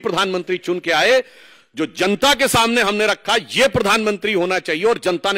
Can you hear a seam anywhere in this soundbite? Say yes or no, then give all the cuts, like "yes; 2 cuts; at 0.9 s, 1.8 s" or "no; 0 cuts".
no; 0 cuts